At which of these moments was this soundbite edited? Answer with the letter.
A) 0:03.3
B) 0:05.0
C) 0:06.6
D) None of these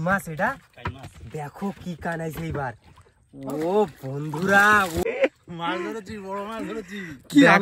B